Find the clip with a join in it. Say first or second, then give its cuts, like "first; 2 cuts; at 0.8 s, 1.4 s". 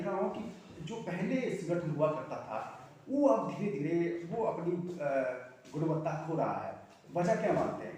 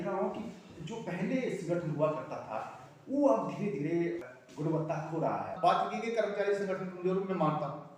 second; 2 cuts; at 4.3 s, 5.5 s